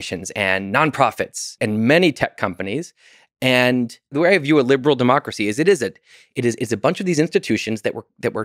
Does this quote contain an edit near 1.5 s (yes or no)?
yes